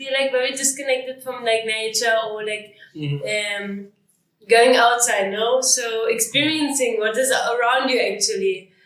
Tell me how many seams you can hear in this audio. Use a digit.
0